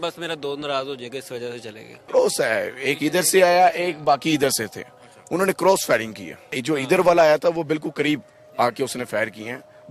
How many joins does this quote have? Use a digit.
2